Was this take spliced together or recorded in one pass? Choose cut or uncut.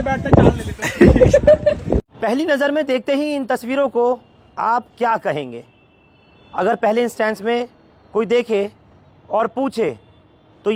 uncut